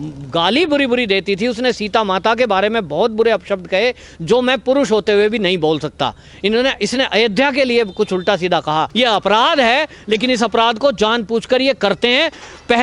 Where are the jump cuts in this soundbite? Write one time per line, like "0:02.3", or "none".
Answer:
0:08.9

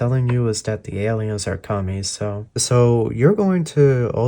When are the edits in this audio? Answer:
0:02.5

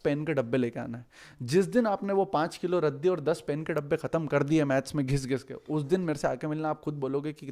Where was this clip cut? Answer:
none

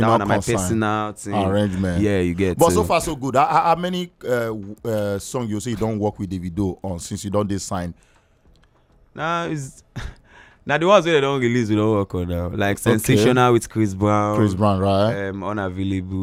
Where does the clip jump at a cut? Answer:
none

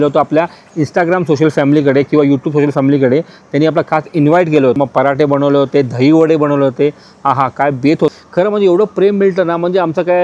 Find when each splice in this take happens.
0:04.8
0:08.1

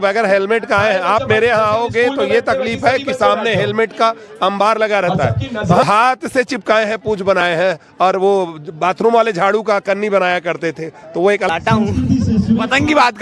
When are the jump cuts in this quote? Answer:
0:05.8
0:11.5

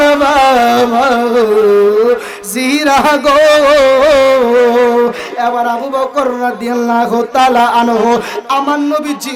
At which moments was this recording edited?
none

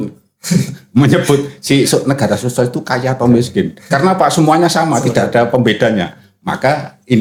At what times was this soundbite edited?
none

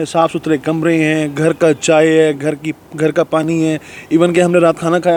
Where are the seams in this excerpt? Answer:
none

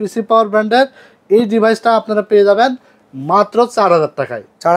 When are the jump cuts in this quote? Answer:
none

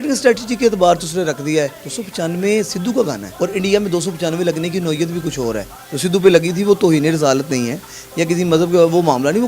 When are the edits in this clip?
0:01.8
0:03.3

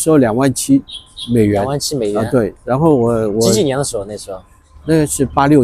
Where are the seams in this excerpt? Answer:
none

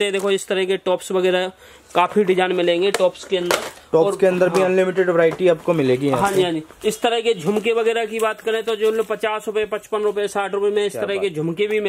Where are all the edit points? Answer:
none

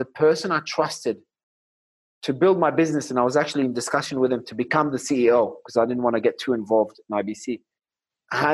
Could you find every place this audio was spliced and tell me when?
none

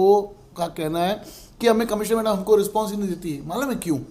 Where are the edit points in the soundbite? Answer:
none

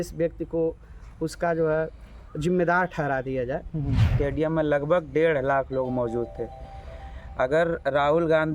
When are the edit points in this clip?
0:04.1

